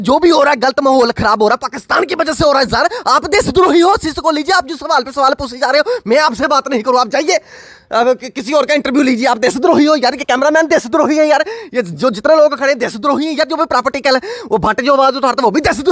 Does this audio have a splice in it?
no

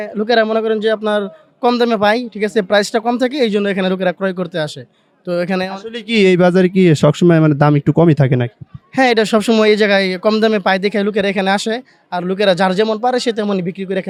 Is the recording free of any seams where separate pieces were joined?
yes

